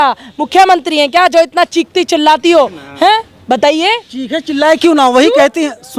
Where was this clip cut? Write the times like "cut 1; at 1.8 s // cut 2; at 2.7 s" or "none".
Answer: none